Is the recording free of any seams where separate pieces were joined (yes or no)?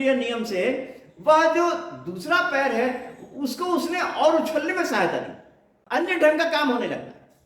no